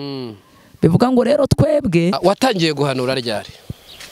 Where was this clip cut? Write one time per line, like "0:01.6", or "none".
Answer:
0:02.2